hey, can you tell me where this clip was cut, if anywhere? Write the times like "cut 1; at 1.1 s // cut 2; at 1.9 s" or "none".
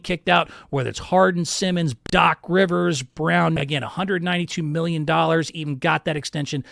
cut 1; at 1.9 s // cut 2; at 3.4 s